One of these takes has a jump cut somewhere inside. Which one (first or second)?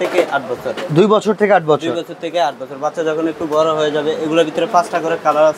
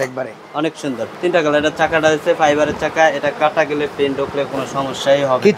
second